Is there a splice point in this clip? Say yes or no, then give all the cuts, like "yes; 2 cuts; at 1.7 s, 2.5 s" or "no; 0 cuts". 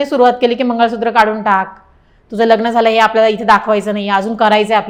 no; 0 cuts